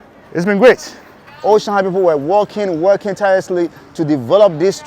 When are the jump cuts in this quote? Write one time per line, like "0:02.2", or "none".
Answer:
0:01.2